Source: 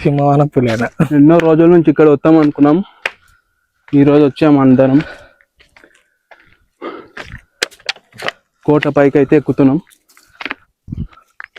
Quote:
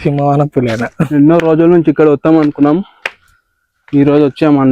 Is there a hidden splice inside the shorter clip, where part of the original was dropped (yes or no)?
no